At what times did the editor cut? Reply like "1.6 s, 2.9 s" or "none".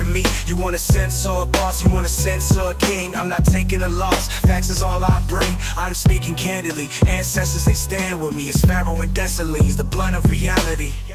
none